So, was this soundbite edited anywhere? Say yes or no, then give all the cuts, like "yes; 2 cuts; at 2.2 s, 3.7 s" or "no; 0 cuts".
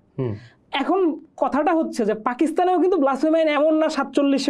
no; 0 cuts